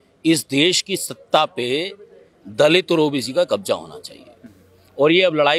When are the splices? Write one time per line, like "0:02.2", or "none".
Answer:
none